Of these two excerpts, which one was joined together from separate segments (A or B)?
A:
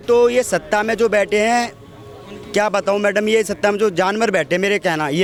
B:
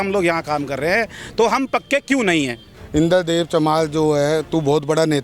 B